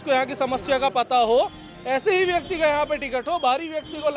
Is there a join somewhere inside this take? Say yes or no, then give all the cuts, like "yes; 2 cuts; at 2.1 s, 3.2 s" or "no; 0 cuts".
no; 0 cuts